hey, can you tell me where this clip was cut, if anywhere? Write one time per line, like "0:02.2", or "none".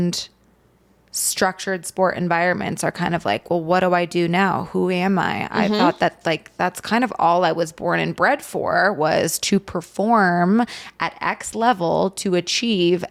none